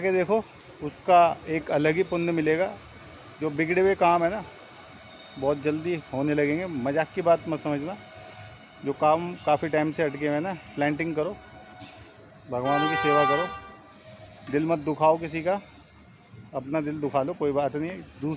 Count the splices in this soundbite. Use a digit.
0